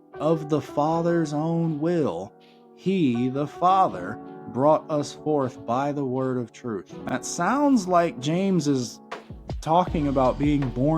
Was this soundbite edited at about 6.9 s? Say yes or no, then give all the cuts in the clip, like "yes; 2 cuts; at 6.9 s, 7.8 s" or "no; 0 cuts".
yes; 1 cut; at 6.9 s